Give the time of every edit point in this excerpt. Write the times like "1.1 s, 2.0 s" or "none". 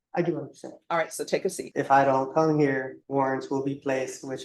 1.6 s, 3.0 s